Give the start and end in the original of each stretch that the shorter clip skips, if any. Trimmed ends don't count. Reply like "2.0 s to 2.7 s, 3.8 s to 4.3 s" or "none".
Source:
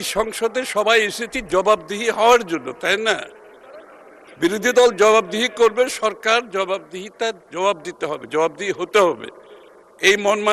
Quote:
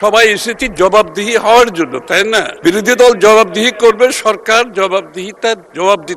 3.3 s to 4.3 s